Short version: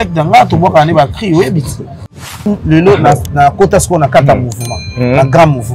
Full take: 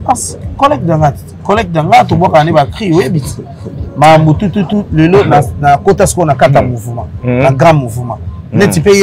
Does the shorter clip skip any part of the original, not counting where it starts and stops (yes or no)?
yes